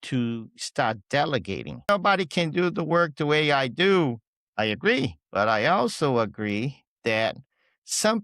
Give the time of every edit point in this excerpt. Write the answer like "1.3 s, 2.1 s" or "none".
1.9 s, 5.2 s